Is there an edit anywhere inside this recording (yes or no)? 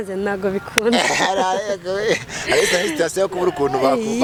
no